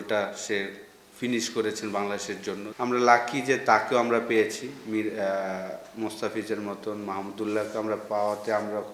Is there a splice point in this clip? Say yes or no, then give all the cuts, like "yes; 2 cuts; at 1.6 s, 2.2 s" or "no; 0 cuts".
yes; 1 cut; at 2.6 s